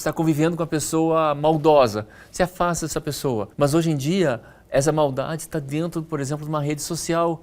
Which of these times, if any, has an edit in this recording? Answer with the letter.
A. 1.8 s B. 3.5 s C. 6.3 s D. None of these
B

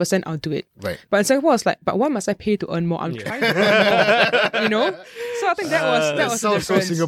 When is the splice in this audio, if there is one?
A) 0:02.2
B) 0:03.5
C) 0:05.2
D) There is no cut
D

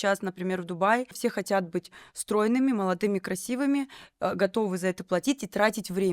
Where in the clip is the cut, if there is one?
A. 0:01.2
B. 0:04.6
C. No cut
A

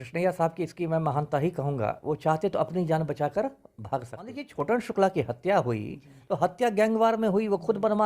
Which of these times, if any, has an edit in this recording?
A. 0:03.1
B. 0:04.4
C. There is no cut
B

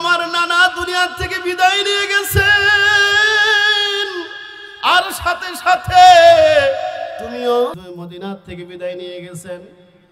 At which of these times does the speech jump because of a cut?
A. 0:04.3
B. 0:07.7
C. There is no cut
B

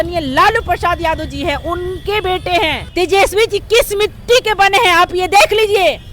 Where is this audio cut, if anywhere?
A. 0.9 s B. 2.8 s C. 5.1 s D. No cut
B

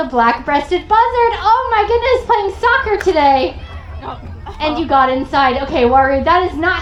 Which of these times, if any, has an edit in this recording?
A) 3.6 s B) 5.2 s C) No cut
C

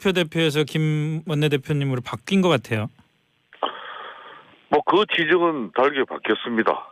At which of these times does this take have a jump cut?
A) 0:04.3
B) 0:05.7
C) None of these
A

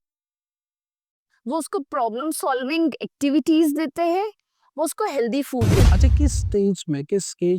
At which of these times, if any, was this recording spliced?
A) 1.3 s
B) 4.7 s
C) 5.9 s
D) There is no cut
C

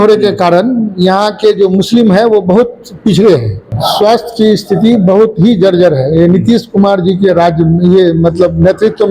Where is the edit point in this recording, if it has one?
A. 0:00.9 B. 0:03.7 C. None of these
B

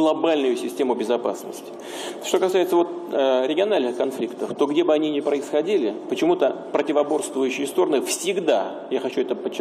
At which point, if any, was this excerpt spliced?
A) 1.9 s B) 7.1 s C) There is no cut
A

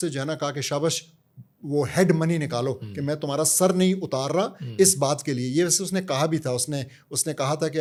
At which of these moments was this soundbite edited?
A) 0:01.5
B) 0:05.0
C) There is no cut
C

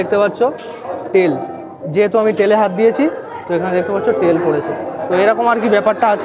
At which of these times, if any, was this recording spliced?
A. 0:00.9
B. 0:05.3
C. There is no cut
C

